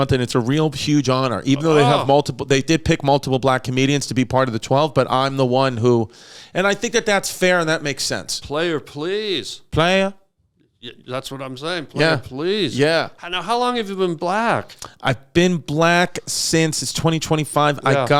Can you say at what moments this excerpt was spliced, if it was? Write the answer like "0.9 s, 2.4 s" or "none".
none